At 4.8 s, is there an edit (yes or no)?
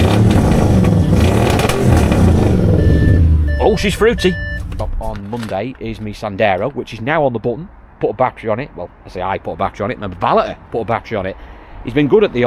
yes